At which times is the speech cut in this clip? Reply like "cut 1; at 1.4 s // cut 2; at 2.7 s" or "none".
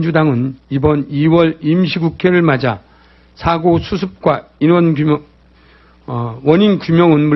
cut 1; at 1.0 s